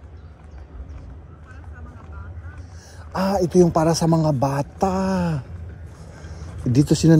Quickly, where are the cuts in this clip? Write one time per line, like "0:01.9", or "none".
none